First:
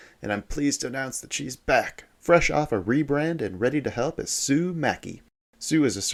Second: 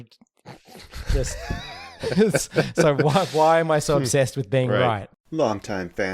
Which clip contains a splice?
second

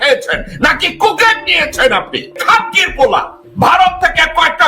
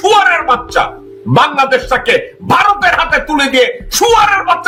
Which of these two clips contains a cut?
first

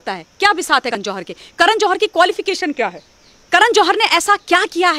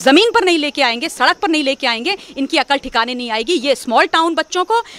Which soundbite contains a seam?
first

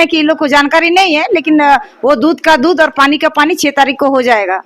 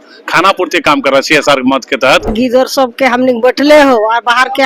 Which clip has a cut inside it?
second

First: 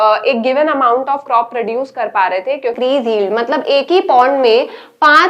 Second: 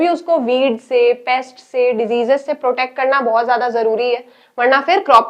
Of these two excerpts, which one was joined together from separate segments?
first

